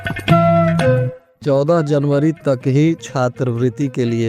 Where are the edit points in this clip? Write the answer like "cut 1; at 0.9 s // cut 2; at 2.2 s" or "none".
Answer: cut 1; at 1.2 s

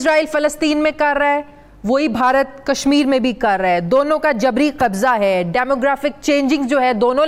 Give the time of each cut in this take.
none

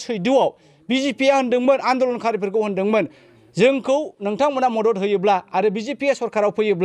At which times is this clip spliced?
none

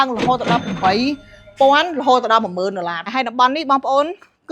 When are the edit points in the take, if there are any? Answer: cut 1; at 3.1 s

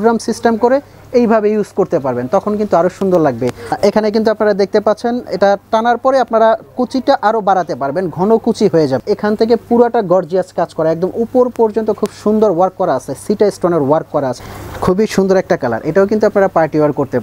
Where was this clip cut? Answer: cut 1; at 3.6 s // cut 2; at 9.0 s // cut 3; at 14.4 s

